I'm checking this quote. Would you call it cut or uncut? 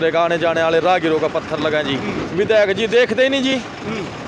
cut